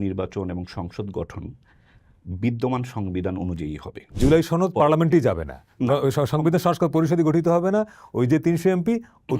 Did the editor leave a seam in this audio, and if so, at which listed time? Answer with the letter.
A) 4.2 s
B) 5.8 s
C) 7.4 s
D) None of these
A